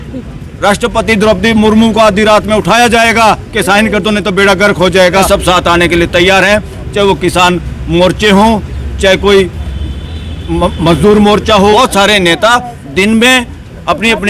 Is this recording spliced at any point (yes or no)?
yes